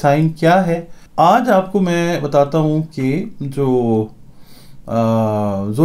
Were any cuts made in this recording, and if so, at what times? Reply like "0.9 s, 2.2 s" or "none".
1.0 s